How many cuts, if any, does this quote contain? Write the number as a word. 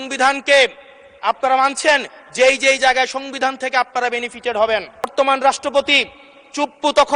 one